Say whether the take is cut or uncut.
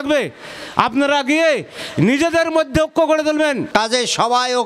cut